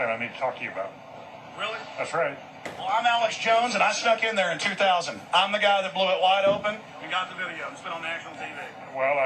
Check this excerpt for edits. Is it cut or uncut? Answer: cut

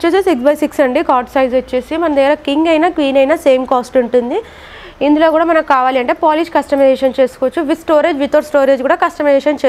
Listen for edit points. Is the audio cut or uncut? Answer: uncut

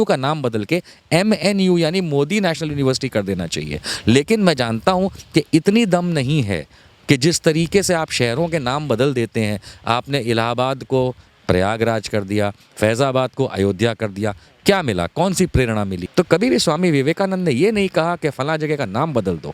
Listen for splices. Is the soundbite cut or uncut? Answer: cut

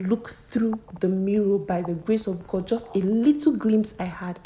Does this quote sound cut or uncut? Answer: uncut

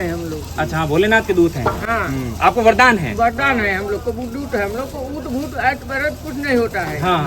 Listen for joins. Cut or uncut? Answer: uncut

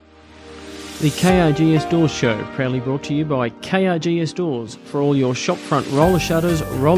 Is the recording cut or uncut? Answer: cut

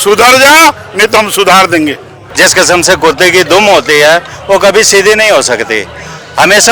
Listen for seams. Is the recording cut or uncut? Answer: cut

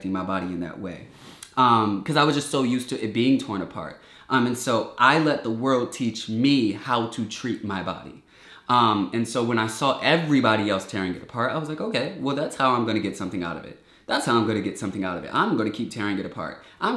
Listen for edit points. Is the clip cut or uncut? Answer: uncut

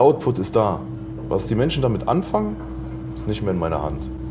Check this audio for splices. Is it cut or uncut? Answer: uncut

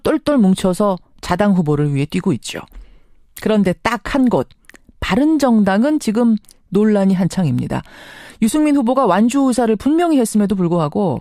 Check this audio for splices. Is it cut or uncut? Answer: uncut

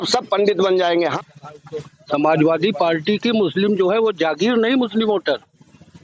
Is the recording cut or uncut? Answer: cut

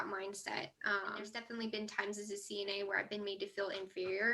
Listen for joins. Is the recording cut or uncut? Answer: cut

